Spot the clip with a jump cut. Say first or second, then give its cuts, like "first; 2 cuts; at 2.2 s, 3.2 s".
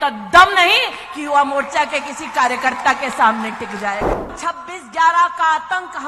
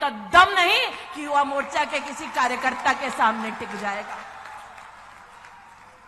first; 1 cut; at 4.3 s